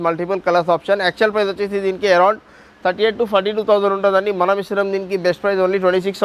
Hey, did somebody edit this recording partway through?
no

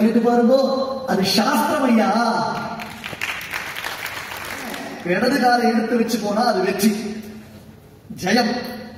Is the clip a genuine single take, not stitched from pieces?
no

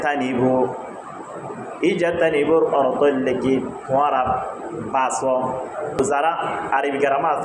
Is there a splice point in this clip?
yes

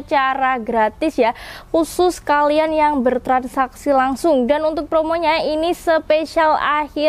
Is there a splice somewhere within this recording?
no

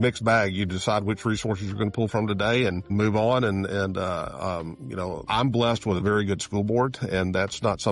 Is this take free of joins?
no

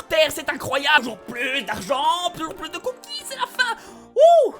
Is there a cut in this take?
yes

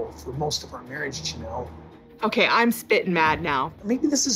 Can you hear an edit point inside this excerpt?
no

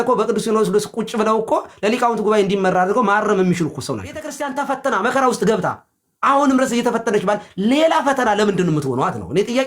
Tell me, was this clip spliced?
yes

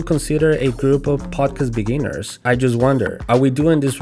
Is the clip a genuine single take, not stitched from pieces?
no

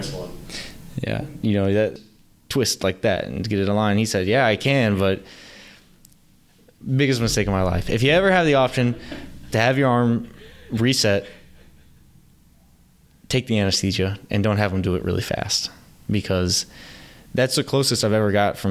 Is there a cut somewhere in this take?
yes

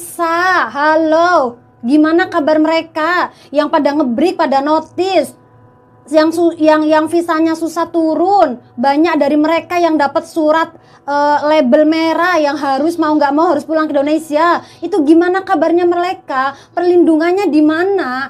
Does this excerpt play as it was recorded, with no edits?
yes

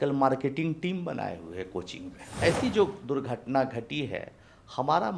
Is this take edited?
yes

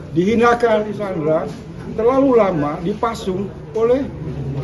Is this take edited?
yes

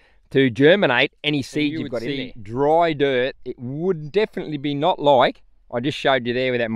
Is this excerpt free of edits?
no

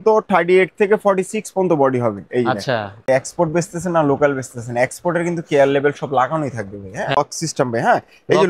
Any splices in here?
yes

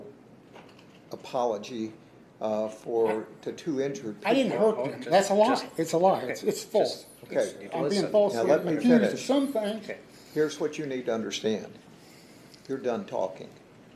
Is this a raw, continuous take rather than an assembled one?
yes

